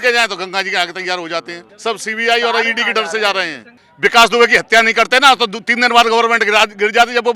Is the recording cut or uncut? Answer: cut